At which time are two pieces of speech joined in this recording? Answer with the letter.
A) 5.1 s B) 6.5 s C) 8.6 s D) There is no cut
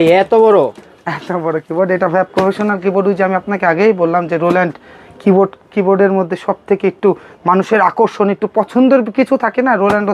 D